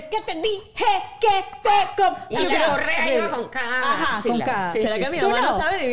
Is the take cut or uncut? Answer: uncut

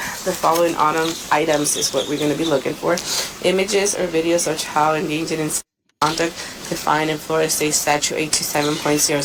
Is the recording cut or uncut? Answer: uncut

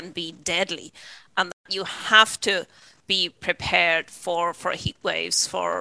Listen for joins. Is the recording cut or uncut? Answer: uncut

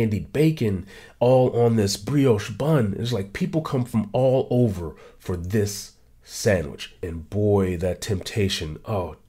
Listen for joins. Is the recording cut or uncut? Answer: cut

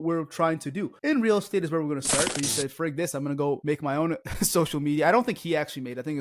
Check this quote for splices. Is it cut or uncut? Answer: cut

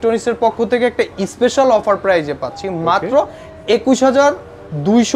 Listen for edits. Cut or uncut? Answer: uncut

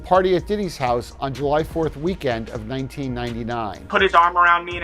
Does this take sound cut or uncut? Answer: cut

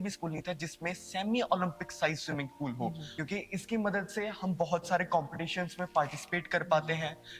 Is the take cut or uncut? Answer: cut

